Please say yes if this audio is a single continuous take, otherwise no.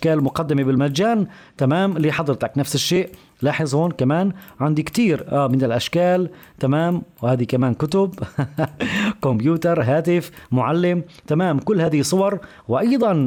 yes